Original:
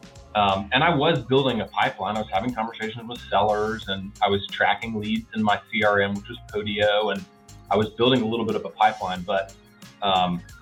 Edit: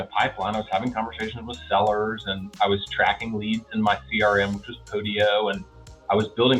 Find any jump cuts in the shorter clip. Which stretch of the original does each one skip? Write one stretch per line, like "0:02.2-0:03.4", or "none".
none